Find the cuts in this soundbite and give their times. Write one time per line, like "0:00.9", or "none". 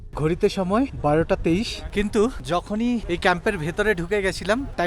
none